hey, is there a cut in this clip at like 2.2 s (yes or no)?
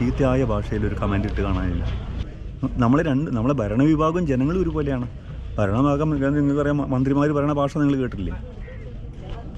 yes